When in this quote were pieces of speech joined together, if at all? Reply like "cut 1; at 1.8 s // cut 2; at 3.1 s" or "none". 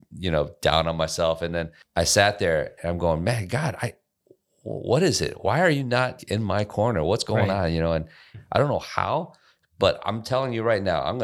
cut 1; at 1.8 s // cut 2; at 6.2 s // cut 3; at 8.4 s